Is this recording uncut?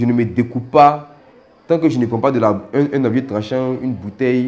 yes; 0 cuts

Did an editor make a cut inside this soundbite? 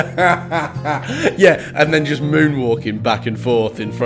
no; 0 cuts

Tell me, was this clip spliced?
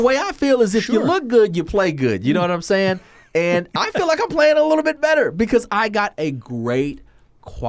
no; 0 cuts

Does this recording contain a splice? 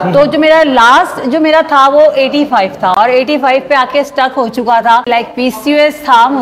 yes; 1 cut; at 5.1 s

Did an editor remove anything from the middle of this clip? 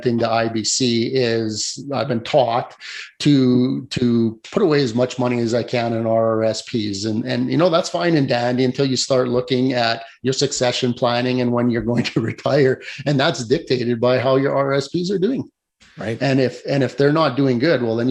no; 0 cuts

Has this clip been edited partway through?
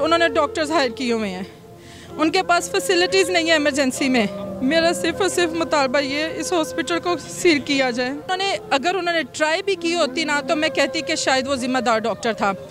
yes; 2 cuts; at 4.4 s, 8.2 s

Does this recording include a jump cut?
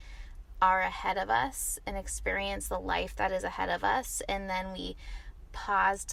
no; 0 cuts

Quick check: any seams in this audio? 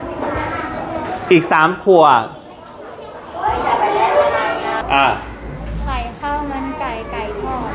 yes; 1 cut; at 4.8 s

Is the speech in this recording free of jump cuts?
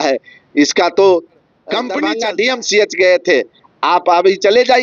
no; 1 cut; at 1.9 s

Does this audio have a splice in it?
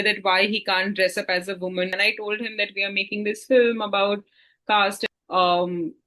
yes; 2 cuts; at 1.9 s, 5.0 s

